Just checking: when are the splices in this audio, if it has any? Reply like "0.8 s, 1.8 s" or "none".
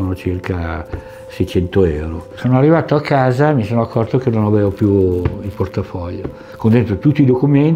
2.3 s, 6.4 s